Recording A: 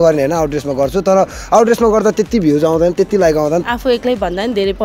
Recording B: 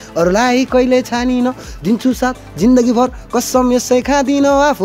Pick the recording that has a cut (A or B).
A